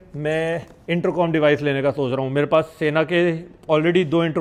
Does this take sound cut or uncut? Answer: uncut